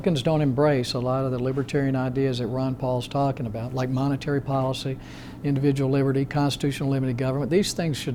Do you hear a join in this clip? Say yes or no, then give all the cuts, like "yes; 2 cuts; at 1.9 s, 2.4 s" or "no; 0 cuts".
no; 0 cuts